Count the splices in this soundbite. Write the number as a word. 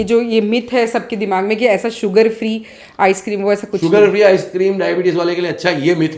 zero